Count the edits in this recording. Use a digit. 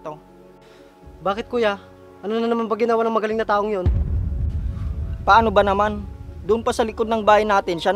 2